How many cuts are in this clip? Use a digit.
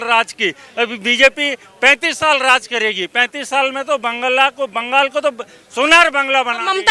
0